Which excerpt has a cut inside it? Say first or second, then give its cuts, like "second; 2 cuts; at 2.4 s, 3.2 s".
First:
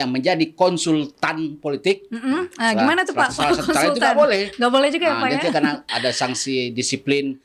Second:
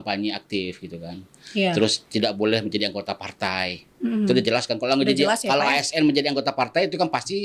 first; 1 cut; at 5.9 s